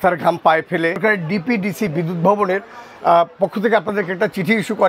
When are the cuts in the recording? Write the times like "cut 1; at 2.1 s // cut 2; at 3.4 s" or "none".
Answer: cut 1; at 1.0 s